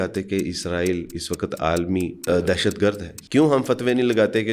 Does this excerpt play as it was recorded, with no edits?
no; 2 cuts; at 2.2 s, 3.1 s

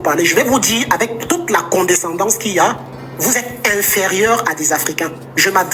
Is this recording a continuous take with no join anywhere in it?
yes; 0 cuts

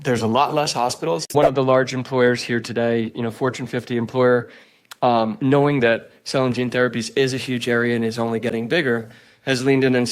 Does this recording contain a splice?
yes; 1 cut; at 1.3 s

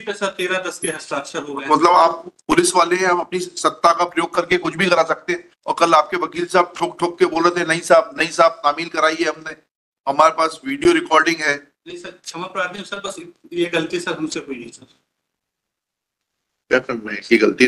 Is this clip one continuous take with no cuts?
yes; 0 cuts

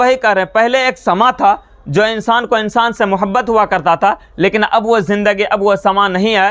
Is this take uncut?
yes; 0 cuts

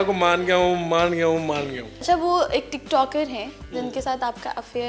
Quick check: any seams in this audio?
yes; 1 cut; at 2.0 s

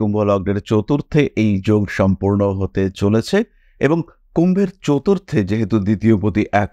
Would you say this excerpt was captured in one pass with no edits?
yes; 0 cuts

